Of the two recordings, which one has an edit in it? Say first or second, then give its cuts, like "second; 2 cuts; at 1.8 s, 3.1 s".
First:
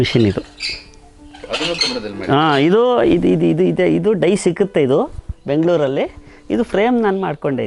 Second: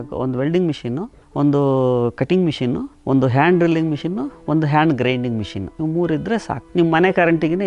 second; 4 cuts; at 1.2 s, 2.9 s, 5.6 s, 6.6 s